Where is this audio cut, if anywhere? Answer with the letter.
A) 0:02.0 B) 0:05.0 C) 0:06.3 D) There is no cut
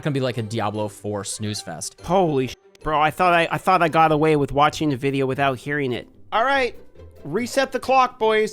A